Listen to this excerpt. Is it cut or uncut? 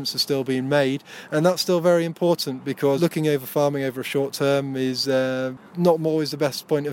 cut